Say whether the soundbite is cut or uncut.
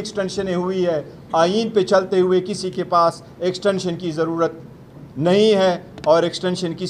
uncut